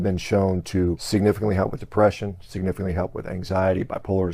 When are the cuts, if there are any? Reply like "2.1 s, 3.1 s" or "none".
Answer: 1.0 s